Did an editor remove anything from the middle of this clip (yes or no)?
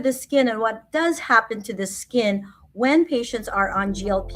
no